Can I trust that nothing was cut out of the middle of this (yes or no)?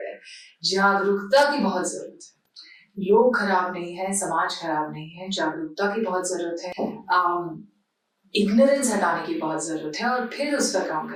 yes